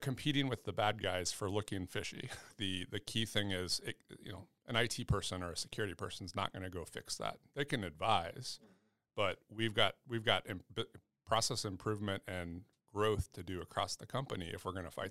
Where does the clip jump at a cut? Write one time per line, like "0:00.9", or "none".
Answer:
0:02.5